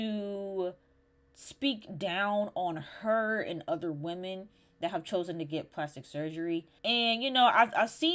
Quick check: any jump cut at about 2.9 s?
no; 1 cut; at 6.7 s

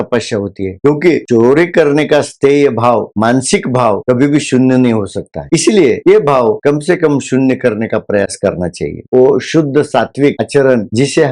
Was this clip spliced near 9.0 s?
yes; 1 cut; at 9.0 s

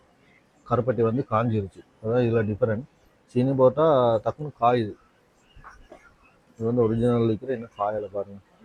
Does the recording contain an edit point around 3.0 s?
no; 0 cuts

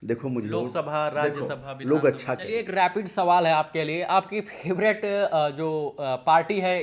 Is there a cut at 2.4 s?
yes; 1 cut; at 2.4 s

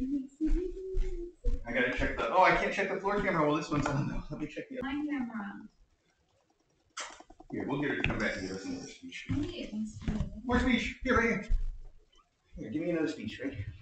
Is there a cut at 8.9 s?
no; 1 cut; at 4.8 s

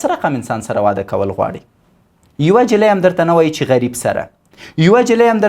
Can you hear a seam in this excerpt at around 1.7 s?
no; 0 cuts

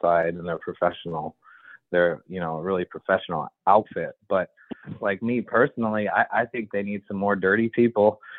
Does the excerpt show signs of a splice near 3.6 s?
no; 1 cut; at 4.9 s

